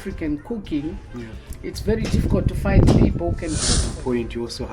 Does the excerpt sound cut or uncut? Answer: cut